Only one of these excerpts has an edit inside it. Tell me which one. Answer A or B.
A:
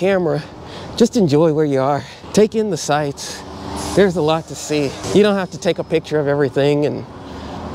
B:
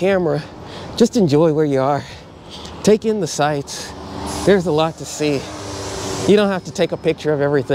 A